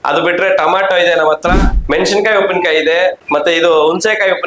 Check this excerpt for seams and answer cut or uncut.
cut